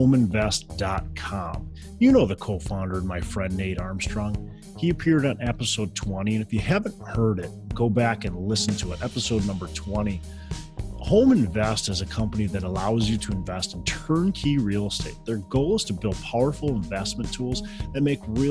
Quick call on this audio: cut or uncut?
uncut